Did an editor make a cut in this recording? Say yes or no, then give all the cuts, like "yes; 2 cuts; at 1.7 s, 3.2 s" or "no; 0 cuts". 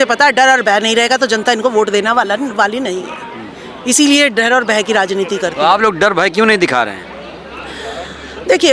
no; 0 cuts